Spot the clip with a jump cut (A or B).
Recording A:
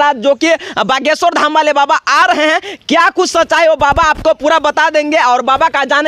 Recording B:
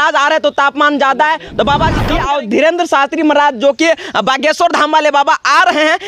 B